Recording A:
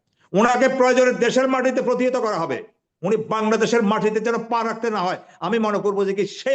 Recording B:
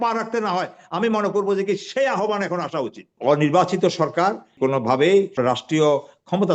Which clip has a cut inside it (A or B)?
B